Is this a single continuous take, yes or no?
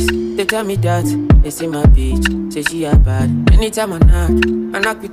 yes